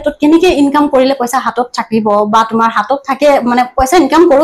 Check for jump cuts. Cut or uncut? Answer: uncut